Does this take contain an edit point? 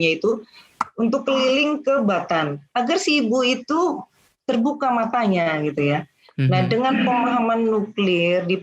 yes; 1 cut; at 2.6 s

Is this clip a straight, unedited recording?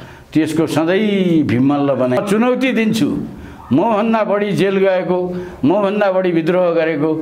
no; 1 cut; at 2.2 s

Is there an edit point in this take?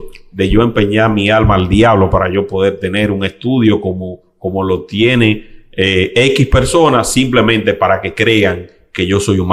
no; 0 cuts

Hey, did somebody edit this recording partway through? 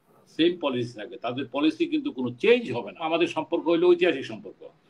yes; 1 cut; at 3.1 s

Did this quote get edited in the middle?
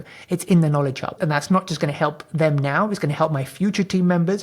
yes; 1 cut; at 1.2 s

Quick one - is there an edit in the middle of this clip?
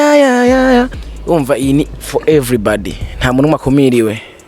yes; 1 cut; at 1.1 s

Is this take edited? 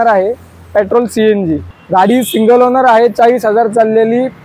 yes; 1 cut; at 1.7 s

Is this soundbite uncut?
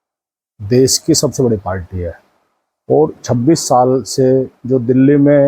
yes; 0 cuts

